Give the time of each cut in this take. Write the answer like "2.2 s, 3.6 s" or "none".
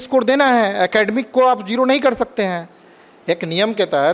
none